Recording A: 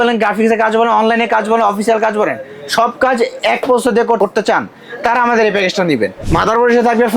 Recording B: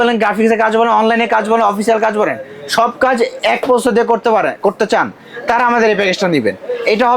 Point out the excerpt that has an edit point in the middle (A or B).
A